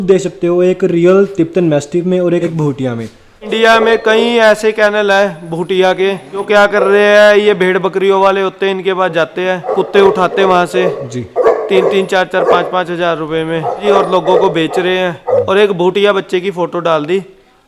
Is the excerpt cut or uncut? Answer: cut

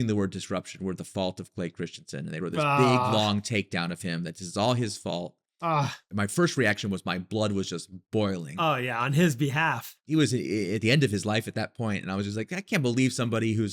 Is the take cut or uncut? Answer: cut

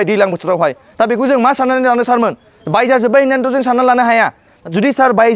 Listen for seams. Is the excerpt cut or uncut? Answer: uncut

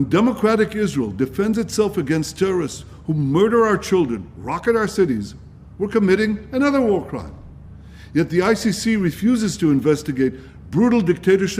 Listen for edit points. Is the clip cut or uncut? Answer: cut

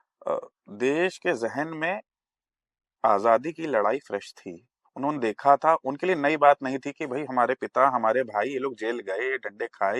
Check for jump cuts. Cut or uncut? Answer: uncut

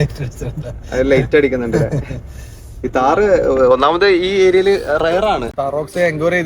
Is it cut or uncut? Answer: cut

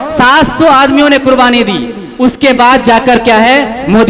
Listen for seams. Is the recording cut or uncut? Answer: uncut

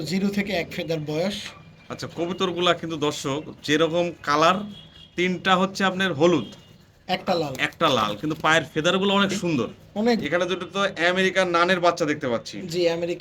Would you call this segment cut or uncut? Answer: cut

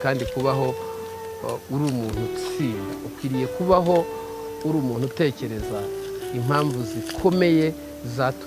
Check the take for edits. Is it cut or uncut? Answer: uncut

